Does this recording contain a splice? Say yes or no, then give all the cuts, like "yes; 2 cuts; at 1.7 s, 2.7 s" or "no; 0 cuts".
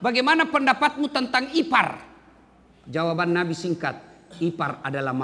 no; 0 cuts